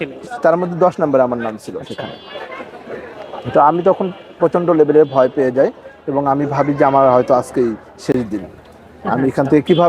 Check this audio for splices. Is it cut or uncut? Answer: uncut